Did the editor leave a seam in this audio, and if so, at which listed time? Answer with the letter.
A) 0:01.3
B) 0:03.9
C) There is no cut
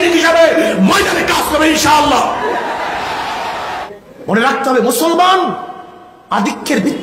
B